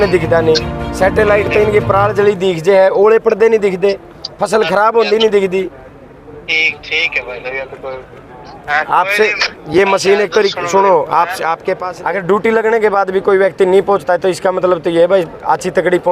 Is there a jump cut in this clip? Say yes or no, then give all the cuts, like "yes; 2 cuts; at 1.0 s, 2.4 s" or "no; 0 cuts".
yes; 1 cut; at 11.9 s